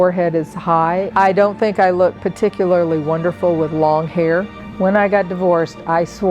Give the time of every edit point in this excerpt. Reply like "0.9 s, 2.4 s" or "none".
1.1 s, 4.5 s